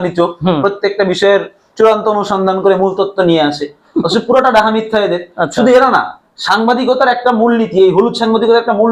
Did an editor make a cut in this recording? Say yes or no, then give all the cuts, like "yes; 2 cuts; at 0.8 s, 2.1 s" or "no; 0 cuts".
no; 0 cuts